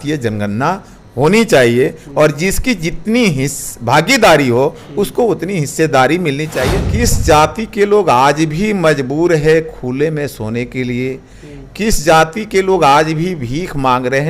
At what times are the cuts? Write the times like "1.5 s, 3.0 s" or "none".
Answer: 6.6 s